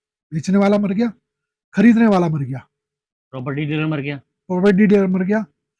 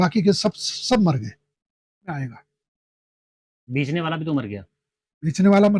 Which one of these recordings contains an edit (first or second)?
second